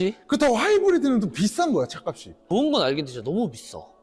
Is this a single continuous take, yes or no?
no